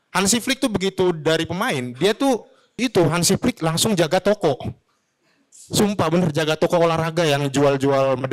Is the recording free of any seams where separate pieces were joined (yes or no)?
no